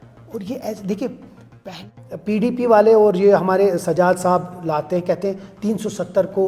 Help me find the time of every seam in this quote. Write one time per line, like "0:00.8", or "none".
0:01.9